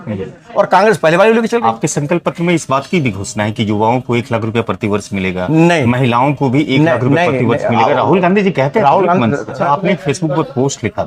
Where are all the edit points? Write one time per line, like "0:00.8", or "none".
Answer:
0:01.6
0:09.5